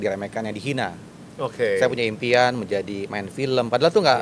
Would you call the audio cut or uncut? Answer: uncut